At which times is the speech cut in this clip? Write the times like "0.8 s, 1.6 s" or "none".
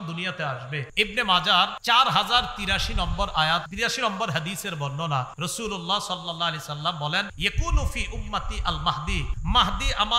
0.9 s, 1.8 s, 3.7 s, 5.3 s, 7.3 s, 9.3 s